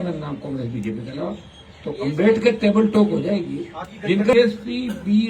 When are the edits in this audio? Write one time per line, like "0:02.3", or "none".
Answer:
0:04.3